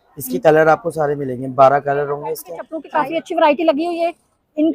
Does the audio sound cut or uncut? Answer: cut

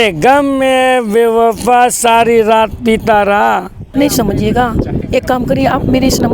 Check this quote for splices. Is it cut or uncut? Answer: cut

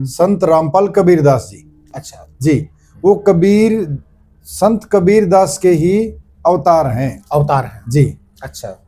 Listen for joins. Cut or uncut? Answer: uncut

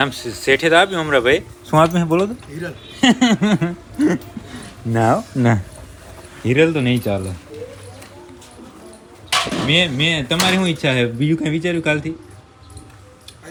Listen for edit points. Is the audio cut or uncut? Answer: uncut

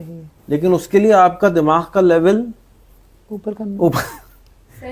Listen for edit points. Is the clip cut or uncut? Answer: uncut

